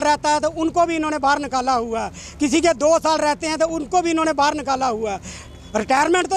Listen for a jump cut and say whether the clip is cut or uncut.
uncut